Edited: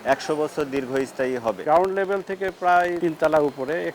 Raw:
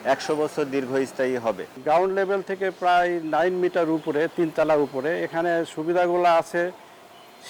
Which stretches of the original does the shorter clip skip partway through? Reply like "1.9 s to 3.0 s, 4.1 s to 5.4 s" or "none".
1.6 s to 1.8 s, 3.2 s to 4.3 s